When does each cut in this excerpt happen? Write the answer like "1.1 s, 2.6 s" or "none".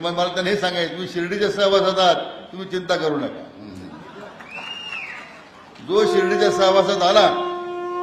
none